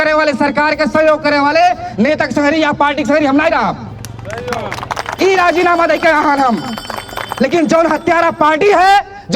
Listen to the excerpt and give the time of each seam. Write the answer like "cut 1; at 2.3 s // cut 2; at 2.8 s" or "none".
none